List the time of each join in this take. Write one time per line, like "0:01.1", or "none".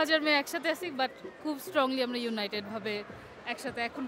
none